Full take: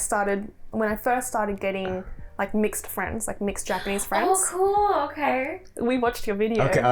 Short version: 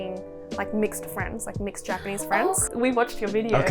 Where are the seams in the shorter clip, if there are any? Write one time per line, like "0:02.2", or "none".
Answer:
0:02.6